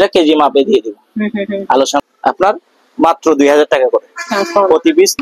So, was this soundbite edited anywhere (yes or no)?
yes